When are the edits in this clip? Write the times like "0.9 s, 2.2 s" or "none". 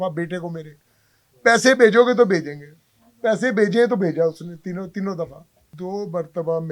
5.7 s